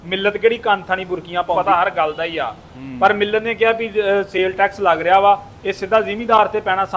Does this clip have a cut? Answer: yes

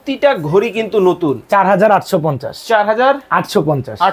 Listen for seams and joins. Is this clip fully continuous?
yes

